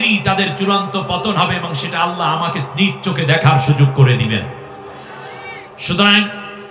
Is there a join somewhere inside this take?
no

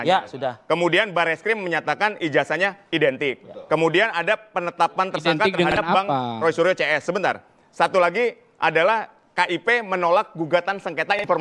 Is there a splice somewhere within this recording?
no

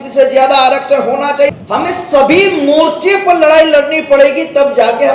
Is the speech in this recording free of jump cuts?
no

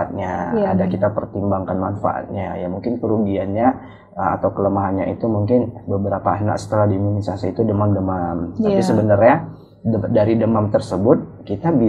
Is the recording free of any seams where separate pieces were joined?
yes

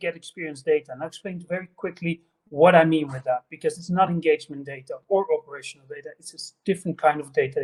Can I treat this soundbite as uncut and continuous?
yes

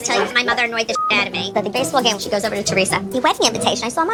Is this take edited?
no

